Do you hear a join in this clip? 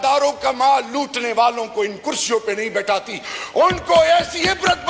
no; 0 cuts

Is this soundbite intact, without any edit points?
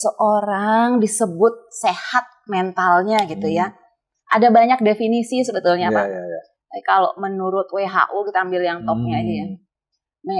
yes; 0 cuts

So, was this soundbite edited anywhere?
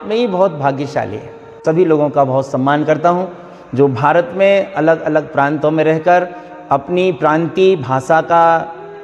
yes; 1 cut; at 1.6 s

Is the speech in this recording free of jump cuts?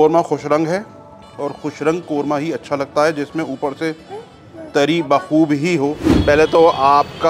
no; 1 cut; at 6.1 s

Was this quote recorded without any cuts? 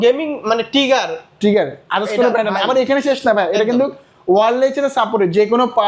yes; 0 cuts

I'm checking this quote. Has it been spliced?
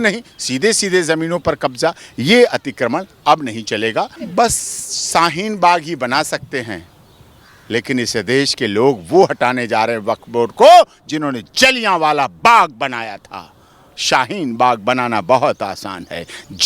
yes; 1 cut; at 4.2 s

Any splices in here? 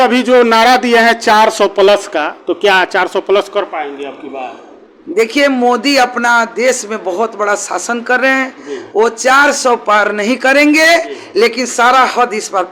no; 0 cuts

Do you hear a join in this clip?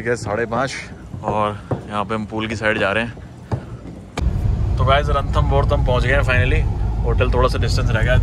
yes; 1 cut; at 4.2 s

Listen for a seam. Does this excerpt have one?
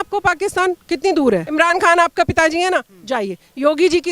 yes; 1 cut; at 1.5 s

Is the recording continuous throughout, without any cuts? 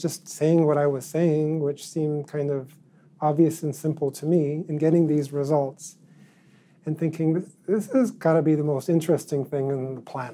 yes; 0 cuts

